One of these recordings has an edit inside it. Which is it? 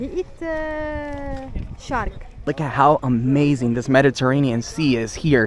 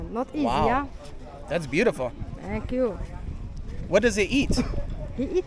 first; 1 cut; at 2.5 s

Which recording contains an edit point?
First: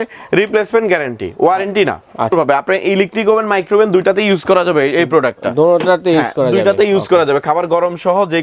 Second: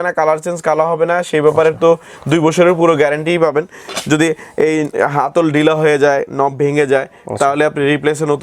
first; 1 cut; at 2.3 s

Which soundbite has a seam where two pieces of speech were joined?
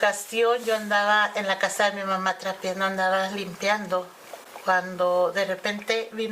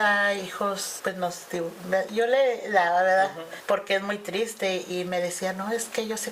second; 3 cuts; at 0.9 s, 3.5 s, 4.9 s

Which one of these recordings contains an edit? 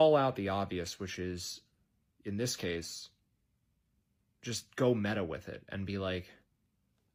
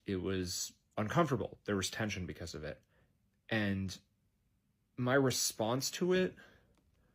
second; 1 cut; at 2.9 s

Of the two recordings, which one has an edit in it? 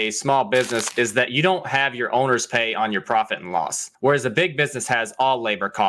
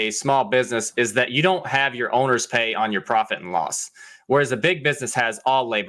first; 1 cut; at 3.8 s

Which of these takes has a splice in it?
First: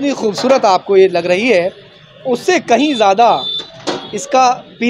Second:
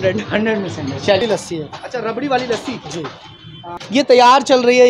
second; 2 cuts; at 1.2 s, 3.6 s

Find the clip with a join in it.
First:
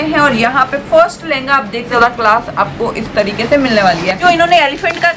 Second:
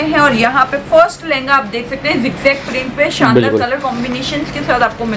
first; 2 cuts; at 1.9 s, 4.2 s

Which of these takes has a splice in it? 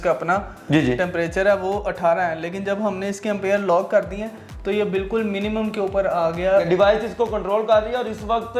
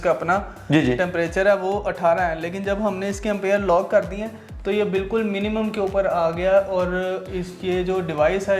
first; 1 cut; at 6.7 s

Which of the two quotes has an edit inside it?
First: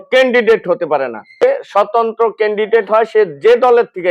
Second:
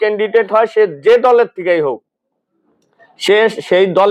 first; 1 cut; at 1.4 s

